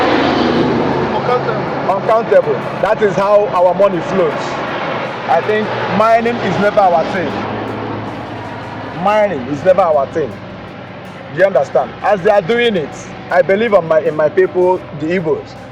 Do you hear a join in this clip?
yes; 1 cut; at 5.1 s

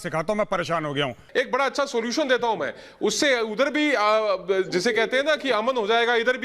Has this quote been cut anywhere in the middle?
yes; 1 cut; at 1.2 s

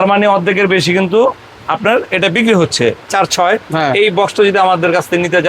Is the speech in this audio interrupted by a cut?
yes; 1 cut; at 3.1 s

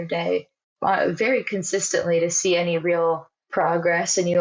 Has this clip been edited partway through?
yes; 1 cut; at 3.3 s

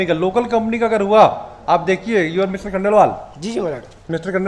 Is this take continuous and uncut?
yes; 0 cuts

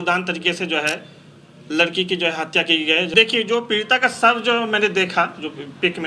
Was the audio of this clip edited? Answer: yes; 1 cut; at 3.1 s

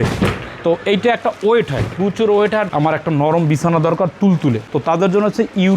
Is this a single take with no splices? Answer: no; 1 cut; at 2.7 s

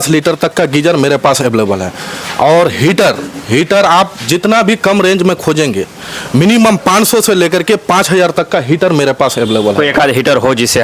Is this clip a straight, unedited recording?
yes; 0 cuts

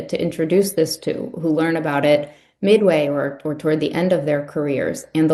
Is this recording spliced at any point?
no; 0 cuts

